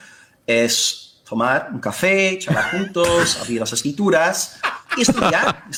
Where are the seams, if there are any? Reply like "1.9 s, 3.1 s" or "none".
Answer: none